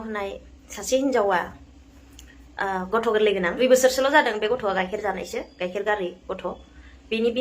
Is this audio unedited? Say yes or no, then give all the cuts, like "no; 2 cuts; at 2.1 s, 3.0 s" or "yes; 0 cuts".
no; 1 cut; at 3.5 s